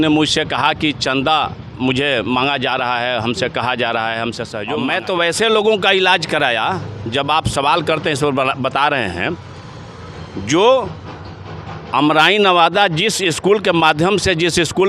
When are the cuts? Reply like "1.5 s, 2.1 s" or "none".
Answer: 4.6 s